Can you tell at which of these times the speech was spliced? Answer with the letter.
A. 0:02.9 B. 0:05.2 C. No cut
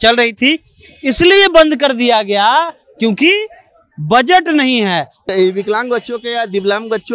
B